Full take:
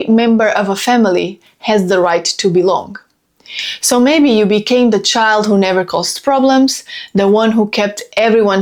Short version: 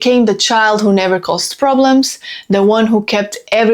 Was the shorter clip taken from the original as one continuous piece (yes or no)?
yes